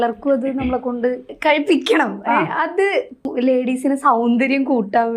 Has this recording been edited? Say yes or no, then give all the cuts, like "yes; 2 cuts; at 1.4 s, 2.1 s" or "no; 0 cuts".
yes; 2 cuts; at 1.3 s, 3.3 s